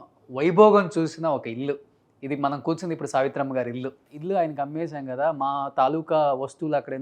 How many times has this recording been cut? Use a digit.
1